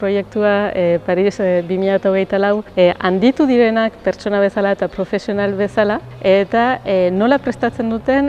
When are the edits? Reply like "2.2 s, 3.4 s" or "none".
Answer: 2.7 s, 6.1 s